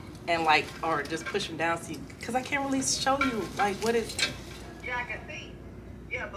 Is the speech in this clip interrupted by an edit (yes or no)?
no